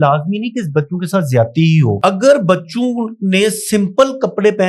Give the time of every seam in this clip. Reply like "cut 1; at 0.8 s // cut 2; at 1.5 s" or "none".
cut 1; at 2.0 s